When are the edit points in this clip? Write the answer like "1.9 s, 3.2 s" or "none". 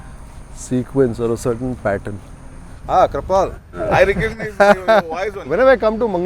2.8 s, 5.3 s

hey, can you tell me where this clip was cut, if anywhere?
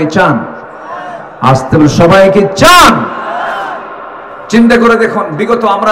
4.3 s

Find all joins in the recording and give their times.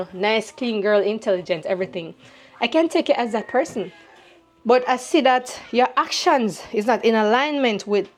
none

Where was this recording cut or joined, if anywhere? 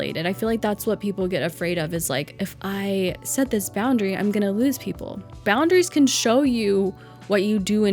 5.4 s

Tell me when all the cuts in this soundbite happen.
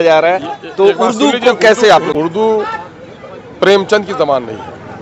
2.1 s

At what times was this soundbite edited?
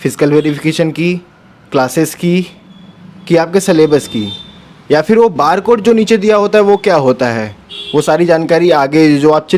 none

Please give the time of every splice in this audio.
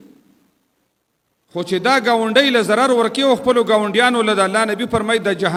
none

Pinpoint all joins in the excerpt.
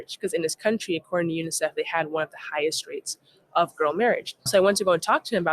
4.5 s

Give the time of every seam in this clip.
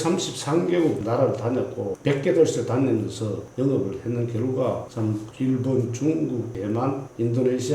1.0 s, 1.9 s

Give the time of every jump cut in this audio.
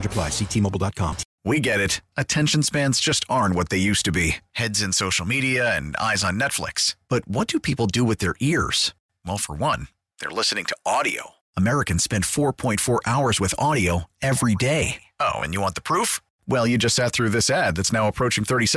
1.3 s

